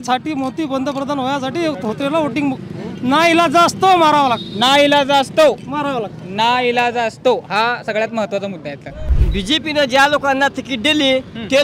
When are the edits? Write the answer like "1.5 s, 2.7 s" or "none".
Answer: 9.1 s